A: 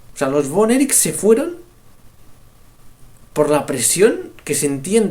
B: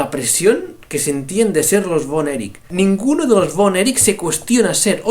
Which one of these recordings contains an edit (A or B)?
B